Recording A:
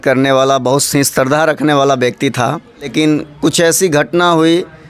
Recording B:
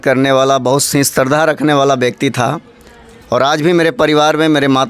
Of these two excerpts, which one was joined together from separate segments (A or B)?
A